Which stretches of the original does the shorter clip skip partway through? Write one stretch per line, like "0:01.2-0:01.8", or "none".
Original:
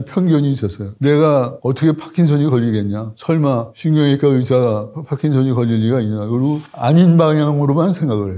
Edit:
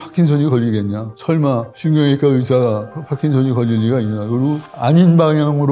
none